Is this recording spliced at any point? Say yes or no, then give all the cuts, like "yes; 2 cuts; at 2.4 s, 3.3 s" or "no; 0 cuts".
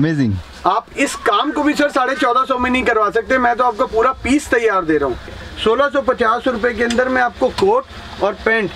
yes; 1 cut; at 5.4 s